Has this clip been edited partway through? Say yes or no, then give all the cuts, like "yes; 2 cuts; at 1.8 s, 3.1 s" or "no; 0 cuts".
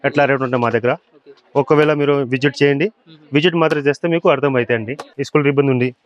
no; 0 cuts